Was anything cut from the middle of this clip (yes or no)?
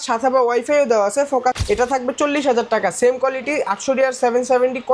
yes